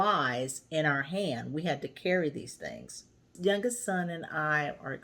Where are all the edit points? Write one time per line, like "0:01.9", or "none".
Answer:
0:03.4